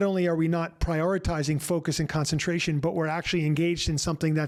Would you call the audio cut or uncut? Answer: uncut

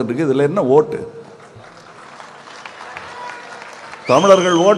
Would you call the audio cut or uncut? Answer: uncut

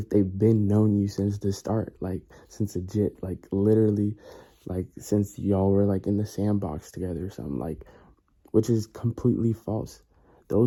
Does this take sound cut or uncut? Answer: uncut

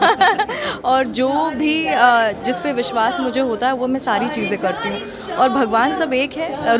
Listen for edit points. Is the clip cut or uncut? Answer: uncut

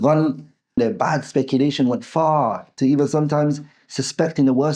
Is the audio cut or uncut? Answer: cut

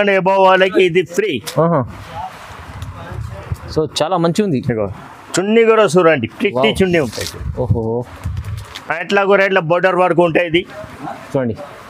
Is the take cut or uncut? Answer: uncut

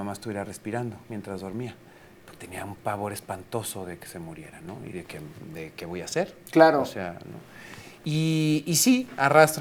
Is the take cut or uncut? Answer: uncut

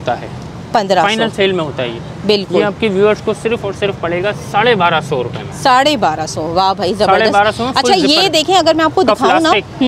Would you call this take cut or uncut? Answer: uncut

